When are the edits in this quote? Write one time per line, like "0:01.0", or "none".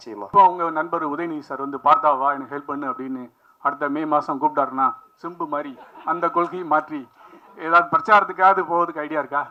none

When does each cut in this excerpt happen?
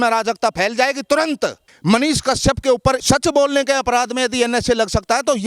0:01.7
0:03.0

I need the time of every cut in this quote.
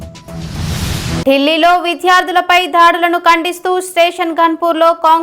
0:01.2

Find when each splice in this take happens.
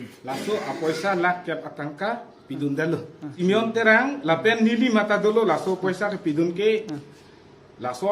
0:03.2

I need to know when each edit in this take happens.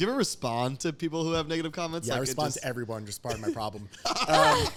none

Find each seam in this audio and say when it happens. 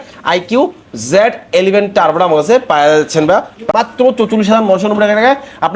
0:03.7

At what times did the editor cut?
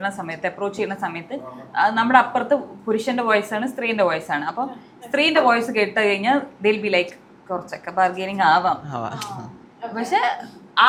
none

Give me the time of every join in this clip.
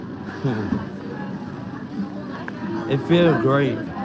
none

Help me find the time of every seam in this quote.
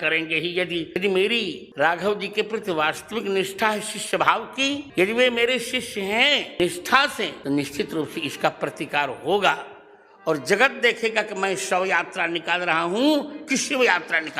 none

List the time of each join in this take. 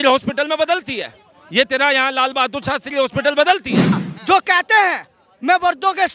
0:04.1

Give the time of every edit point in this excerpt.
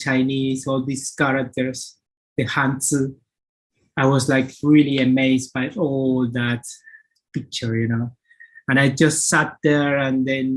none

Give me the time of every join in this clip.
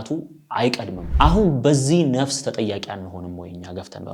0:01.0

